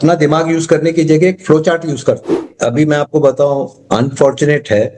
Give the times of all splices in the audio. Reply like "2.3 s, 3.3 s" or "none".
2.5 s